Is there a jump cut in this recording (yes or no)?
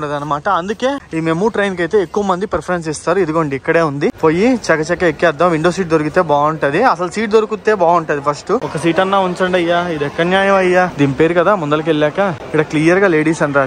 yes